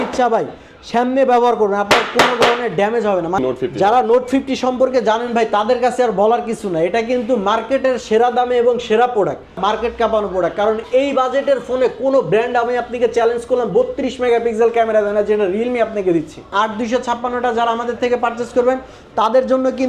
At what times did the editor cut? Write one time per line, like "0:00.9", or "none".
0:03.4
0:09.6
0:16.5